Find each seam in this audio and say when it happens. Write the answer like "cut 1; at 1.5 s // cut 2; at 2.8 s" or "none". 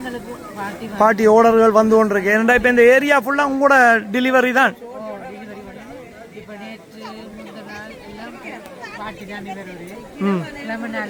none